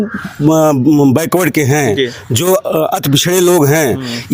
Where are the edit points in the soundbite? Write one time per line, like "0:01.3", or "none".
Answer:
none